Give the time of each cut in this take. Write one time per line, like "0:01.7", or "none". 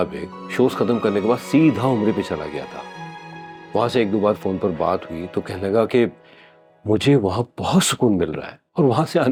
none